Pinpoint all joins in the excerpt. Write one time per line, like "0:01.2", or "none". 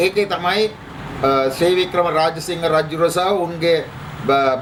none